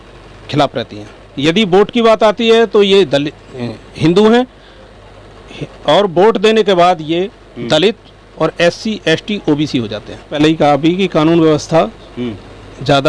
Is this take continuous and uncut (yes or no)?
no